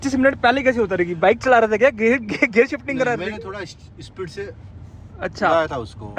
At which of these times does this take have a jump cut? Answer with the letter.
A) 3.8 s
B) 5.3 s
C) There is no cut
C